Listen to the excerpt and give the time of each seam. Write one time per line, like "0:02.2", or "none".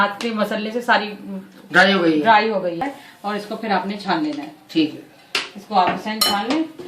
0:02.8

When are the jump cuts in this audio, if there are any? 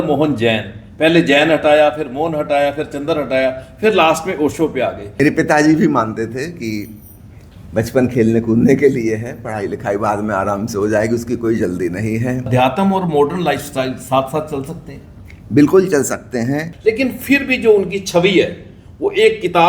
0:05.2
0:12.5
0:16.7

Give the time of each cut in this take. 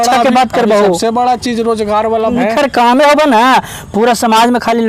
0:02.3

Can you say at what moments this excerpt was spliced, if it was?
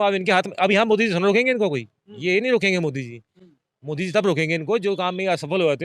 none

